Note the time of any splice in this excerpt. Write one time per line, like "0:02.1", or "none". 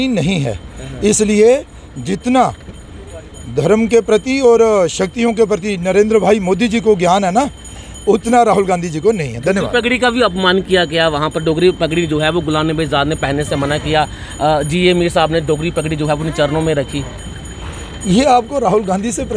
none